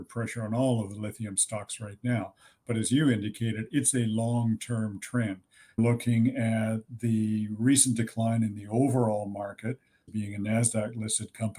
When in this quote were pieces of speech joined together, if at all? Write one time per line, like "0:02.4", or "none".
0:05.8
0:10.1